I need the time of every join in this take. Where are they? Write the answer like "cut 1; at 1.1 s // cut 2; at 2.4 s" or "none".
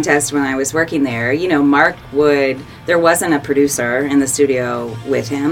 cut 1; at 2.7 s